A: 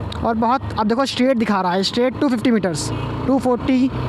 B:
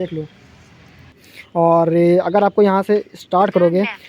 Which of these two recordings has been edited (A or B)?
B